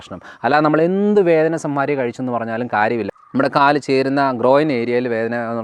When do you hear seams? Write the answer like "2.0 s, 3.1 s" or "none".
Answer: 3.1 s